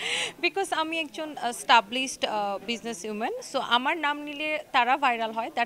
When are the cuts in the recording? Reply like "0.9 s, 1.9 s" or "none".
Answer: none